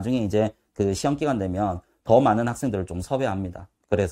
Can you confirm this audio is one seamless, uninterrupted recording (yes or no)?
yes